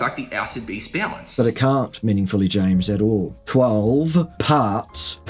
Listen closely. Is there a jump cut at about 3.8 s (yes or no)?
no